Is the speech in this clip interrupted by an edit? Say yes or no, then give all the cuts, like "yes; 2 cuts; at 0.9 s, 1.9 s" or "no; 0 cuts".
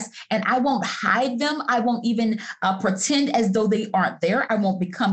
no; 0 cuts